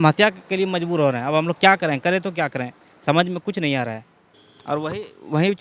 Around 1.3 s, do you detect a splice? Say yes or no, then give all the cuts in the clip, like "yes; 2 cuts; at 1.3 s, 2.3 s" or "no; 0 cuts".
no; 0 cuts